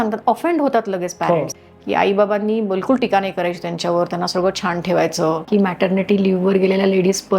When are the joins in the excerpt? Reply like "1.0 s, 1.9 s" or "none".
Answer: 1.5 s, 5.4 s